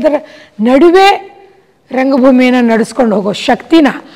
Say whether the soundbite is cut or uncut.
uncut